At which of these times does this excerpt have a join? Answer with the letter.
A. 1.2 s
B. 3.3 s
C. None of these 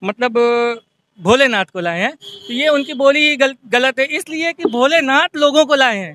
C